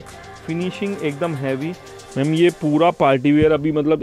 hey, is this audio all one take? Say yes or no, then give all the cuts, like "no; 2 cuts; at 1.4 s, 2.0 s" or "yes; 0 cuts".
no; 1 cut; at 2.0 s